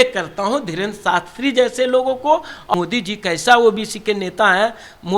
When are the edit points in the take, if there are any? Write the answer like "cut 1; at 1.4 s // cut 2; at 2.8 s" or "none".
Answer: cut 1; at 2.7 s